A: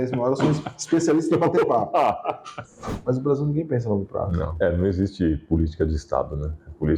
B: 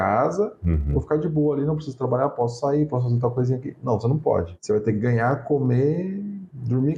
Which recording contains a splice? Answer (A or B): A